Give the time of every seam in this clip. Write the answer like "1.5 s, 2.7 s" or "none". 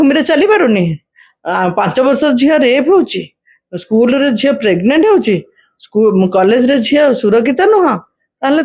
none

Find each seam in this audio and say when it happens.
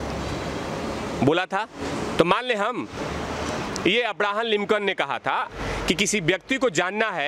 3.6 s, 5.6 s

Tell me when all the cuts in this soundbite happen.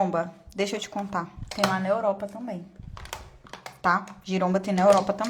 none

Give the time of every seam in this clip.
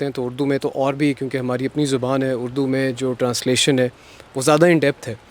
none

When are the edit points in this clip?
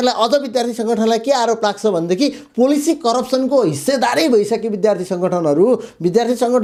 none

